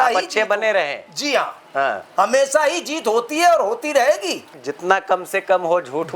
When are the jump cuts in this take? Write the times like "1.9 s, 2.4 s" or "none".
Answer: 4.6 s